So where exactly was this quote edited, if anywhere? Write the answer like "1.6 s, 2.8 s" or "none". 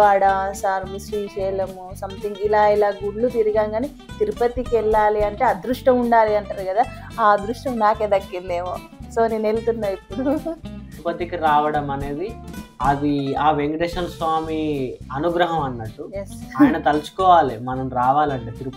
11.0 s